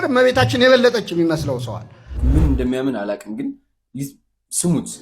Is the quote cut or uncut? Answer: cut